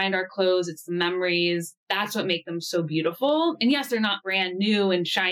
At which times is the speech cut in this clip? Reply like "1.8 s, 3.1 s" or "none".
1.8 s